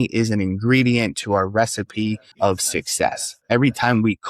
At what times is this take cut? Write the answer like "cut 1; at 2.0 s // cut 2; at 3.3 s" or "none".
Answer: cut 1; at 2.3 s // cut 2; at 3.3 s